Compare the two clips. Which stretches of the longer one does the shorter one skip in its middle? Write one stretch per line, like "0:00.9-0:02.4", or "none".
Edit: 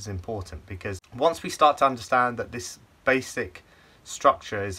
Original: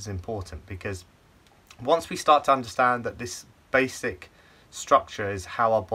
0:01.1-0:01.7